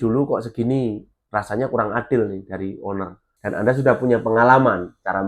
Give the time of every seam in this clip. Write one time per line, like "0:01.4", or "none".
0:03.3